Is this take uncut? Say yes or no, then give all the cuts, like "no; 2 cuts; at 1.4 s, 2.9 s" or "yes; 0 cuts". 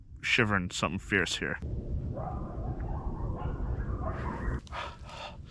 no; 2 cuts; at 1.7 s, 4.6 s